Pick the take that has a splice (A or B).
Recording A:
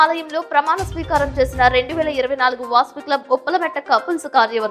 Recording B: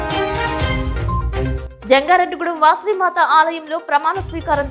B